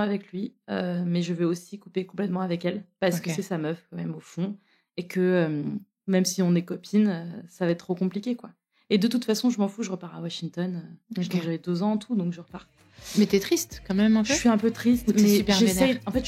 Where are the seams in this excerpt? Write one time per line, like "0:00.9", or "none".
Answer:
none